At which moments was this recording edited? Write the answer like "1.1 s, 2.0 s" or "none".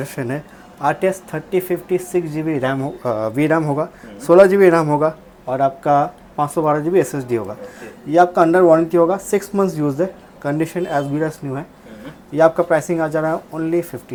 none